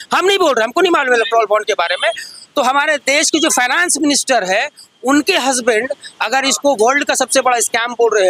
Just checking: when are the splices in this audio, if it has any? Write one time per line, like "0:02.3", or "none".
none